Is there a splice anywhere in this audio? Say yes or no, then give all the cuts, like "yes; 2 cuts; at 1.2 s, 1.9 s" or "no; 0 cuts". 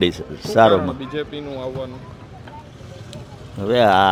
no; 0 cuts